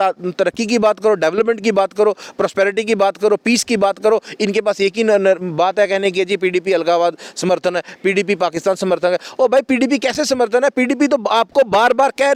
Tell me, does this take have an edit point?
no; 0 cuts

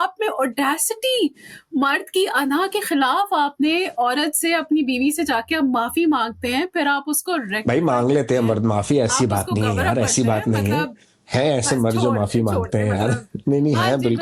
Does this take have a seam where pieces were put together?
no; 0 cuts

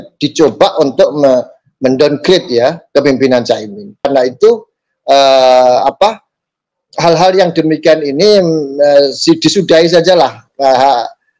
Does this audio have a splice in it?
yes; 1 cut; at 4.1 s

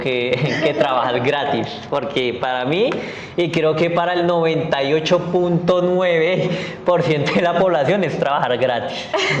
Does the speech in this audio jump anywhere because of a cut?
no; 0 cuts

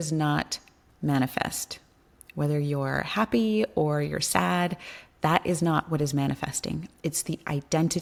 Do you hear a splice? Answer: no; 0 cuts

